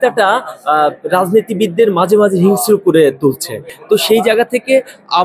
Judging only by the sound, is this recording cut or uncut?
uncut